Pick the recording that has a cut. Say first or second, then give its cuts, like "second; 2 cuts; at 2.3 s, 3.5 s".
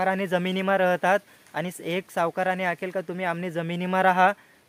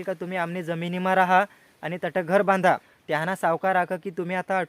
second; 1 cut; at 2.9 s